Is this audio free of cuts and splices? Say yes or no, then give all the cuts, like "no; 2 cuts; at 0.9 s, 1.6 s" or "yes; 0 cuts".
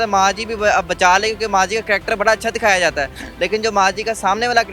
yes; 0 cuts